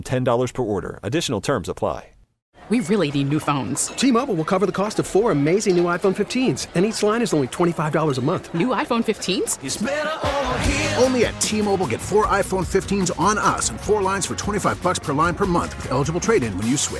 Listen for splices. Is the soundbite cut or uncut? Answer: cut